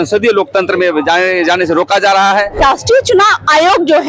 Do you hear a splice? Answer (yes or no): yes